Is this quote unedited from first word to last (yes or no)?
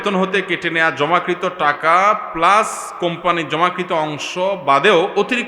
yes